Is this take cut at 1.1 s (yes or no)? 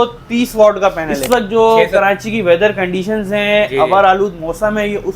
yes